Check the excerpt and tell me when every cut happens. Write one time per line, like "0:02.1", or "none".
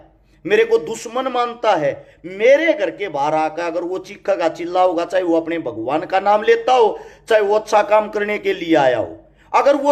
none